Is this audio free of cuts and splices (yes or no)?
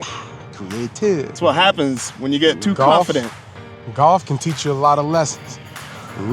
no